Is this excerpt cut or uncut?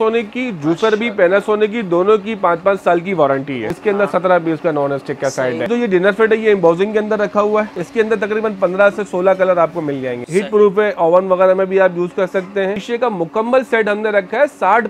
cut